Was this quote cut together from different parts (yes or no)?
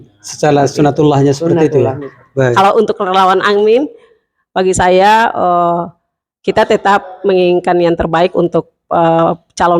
yes